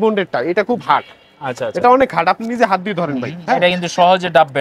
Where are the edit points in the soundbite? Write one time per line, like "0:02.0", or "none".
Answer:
none